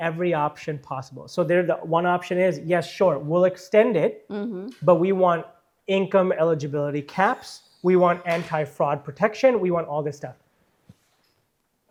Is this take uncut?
yes; 0 cuts

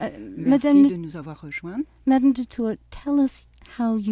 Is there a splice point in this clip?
no; 0 cuts

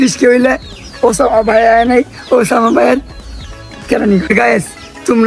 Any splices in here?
yes; 1 cut; at 4.3 s

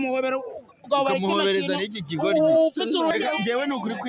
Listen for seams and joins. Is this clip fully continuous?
no; 1 cut; at 3.1 s

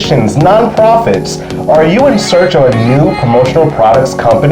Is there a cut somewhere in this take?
no; 0 cuts

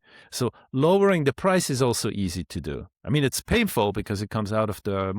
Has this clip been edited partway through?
no; 0 cuts

